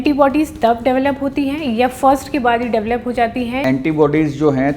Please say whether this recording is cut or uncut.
cut